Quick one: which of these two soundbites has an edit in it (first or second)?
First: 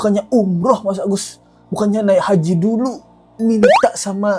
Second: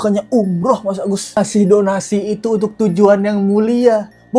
second